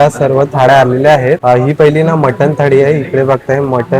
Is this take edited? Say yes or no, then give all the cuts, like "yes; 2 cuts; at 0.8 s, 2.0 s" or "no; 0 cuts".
yes; 1 cut; at 1.4 s